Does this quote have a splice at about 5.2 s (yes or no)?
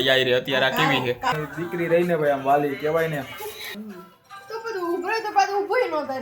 no